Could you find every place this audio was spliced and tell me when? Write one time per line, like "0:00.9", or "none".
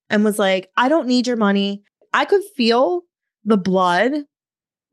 0:02.1